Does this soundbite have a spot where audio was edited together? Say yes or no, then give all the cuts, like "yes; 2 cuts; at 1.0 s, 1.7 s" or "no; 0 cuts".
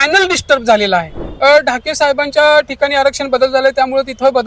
yes; 1 cut; at 1.2 s